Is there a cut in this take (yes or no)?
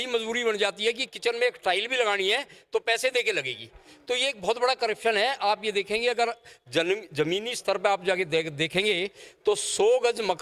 no